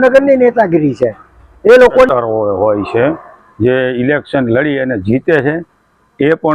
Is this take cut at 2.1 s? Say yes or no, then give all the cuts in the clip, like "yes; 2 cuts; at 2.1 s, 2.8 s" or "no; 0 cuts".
yes; 1 cut; at 2.1 s